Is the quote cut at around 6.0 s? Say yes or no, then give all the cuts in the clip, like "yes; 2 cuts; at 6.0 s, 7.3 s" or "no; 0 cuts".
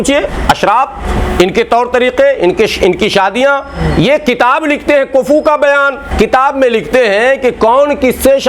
yes; 1 cut; at 6.0 s